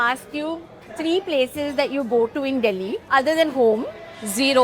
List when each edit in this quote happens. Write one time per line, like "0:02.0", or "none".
0:03.1

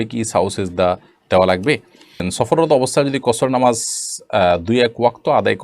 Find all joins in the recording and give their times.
0:02.3

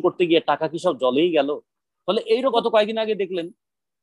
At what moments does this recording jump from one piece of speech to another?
0:02.5

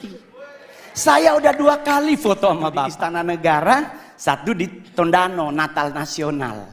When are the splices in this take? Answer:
0:03.0

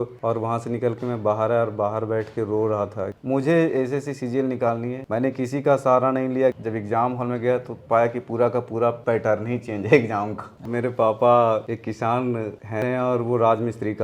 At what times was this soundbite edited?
0:03.1
0:06.6
0:10.7
0:12.8

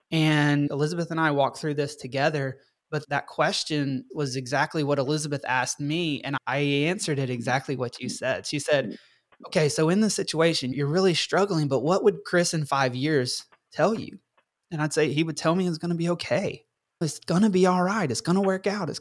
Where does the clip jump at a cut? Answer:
0:03.0
0:06.3

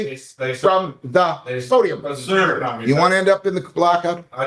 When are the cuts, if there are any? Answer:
none

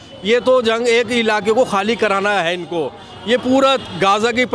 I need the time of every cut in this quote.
none

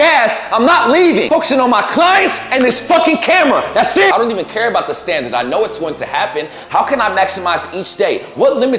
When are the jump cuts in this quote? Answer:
0:04.1

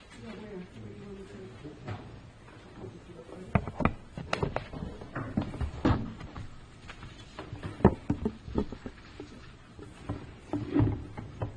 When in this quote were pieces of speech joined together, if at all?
0:03.2
0:08.2

